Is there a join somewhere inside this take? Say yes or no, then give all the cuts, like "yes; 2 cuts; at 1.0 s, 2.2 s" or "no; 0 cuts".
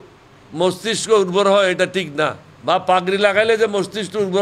yes; 1 cut; at 2.5 s